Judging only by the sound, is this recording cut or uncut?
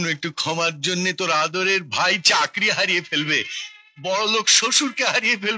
uncut